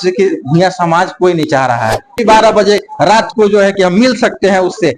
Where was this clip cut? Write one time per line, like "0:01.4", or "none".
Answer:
0:02.2